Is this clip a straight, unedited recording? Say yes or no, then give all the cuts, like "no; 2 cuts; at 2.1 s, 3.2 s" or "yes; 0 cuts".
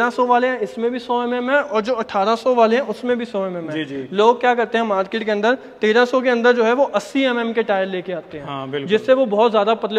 yes; 0 cuts